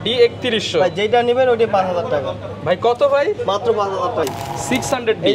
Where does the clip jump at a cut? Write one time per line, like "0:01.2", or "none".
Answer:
0:04.2